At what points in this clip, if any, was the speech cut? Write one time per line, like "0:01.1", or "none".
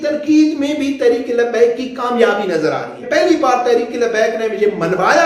0:03.0